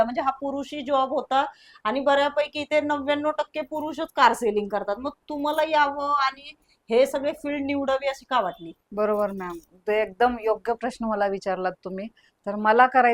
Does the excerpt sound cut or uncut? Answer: uncut